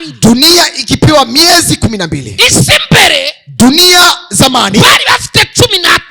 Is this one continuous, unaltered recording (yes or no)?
yes